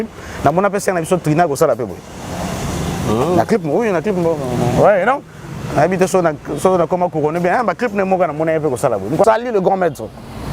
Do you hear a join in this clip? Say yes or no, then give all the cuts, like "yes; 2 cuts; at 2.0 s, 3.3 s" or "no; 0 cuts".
yes; 1 cut; at 9.2 s